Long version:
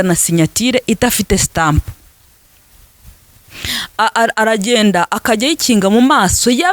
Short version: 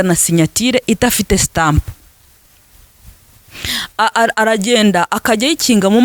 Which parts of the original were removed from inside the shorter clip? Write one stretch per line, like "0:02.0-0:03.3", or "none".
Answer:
none